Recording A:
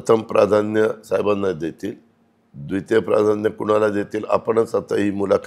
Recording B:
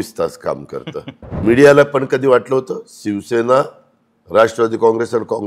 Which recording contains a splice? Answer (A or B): B